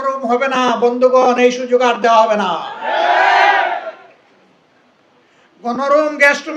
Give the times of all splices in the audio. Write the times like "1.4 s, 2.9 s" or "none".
none